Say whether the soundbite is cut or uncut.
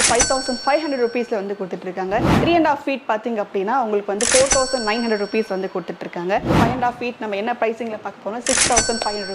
cut